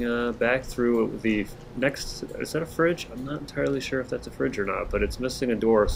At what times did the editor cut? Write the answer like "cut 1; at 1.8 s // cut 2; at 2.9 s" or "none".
none

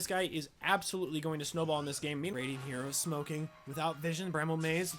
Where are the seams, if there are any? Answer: cut 1; at 2.3 s

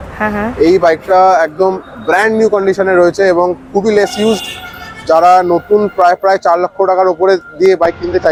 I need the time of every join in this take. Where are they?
none

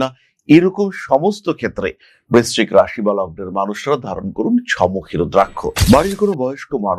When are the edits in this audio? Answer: cut 1; at 5.6 s

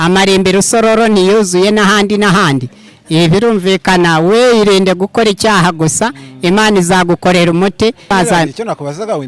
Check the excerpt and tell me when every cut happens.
cut 1; at 8.1 s

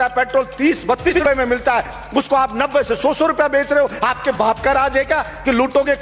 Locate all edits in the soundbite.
cut 1; at 1.1 s

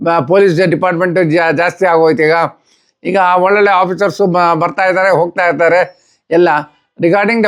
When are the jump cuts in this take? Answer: none

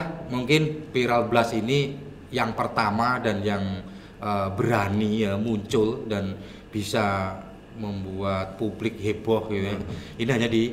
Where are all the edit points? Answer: none

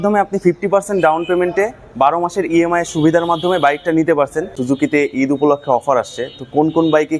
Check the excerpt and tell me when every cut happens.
cut 1; at 4.6 s

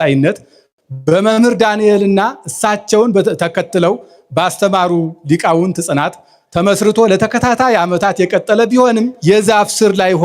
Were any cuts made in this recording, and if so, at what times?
cut 1; at 9.2 s

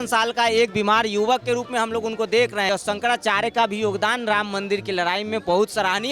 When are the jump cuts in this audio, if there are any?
cut 1; at 2.7 s

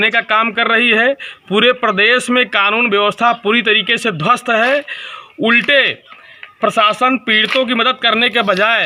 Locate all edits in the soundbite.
none

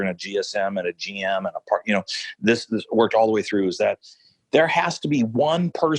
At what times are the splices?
cut 1; at 4.3 s

